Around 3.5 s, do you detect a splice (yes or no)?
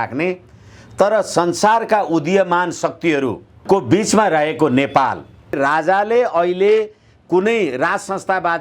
yes